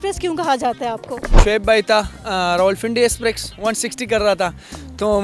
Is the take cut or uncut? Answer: cut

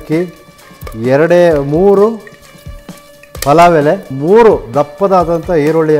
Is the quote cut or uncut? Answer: cut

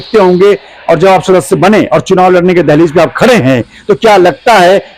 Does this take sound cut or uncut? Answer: uncut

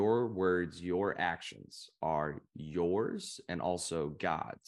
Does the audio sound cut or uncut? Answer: uncut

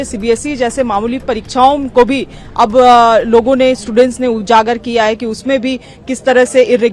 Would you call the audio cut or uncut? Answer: uncut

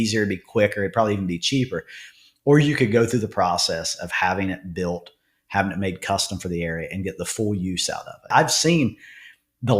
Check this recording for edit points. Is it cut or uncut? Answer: cut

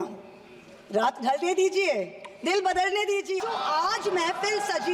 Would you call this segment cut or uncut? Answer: cut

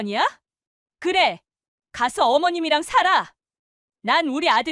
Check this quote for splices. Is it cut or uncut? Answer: uncut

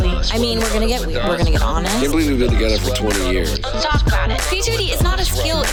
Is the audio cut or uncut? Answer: uncut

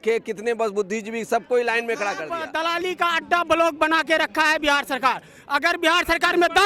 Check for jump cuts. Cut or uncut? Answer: cut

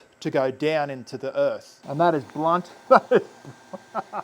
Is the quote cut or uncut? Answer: cut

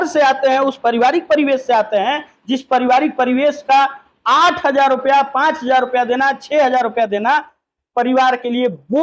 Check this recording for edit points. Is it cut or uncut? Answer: uncut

